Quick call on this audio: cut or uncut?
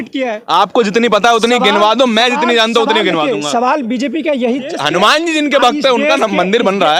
cut